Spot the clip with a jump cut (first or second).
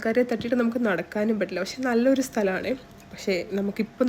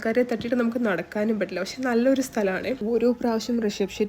second